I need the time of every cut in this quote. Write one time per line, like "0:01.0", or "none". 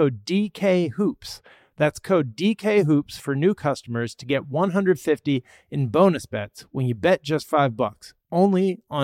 none